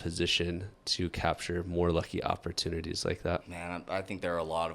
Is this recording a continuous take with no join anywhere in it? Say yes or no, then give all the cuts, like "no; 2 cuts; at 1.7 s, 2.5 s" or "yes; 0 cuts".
no; 1 cut; at 3.5 s